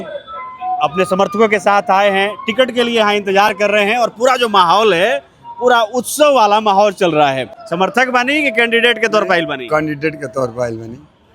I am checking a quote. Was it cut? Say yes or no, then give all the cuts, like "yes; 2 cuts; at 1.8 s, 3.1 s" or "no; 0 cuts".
yes; 1 cut; at 7.5 s